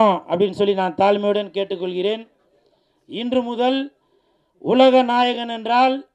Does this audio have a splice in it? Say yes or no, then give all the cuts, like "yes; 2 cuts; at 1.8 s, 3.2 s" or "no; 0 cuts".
no; 0 cuts